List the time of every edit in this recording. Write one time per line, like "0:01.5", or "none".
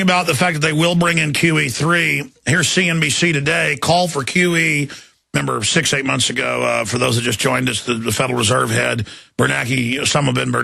0:08.0